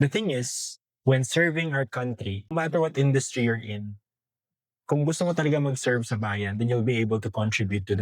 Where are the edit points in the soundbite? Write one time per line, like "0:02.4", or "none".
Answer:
0:02.5